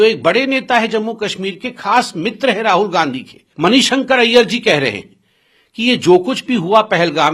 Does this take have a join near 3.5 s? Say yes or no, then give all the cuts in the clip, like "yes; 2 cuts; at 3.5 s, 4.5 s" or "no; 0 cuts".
yes; 1 cut; at 3.5 s